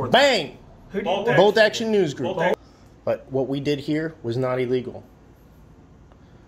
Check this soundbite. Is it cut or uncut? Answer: cut